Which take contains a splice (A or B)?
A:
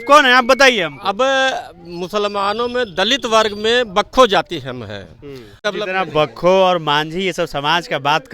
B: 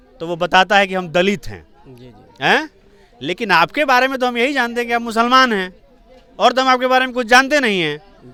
A